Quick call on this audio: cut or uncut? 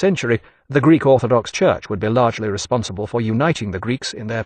cut